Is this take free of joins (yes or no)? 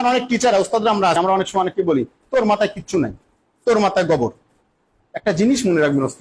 no